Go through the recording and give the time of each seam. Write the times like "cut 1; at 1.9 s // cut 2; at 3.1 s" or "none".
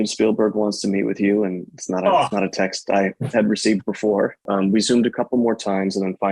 cut 1; at 4.5 s